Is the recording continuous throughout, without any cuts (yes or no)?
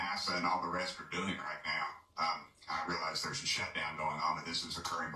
yes